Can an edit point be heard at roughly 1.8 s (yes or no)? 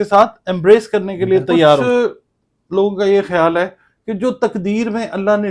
yes